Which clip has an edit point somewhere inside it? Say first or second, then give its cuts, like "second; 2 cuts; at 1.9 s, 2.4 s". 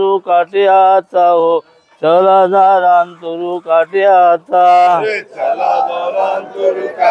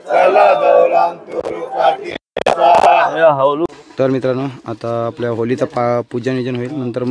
second; 1 cut; at 3.6 s